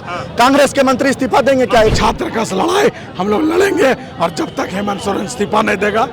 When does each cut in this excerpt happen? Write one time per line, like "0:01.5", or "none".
0:01.9